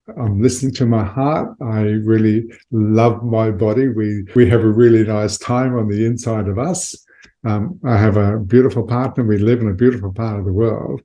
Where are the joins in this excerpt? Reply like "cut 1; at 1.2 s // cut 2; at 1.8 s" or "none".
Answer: cut 1; at 4.2 s